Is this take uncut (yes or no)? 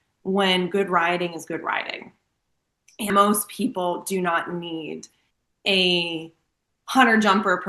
no